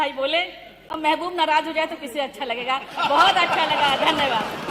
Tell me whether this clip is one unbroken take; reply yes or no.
yes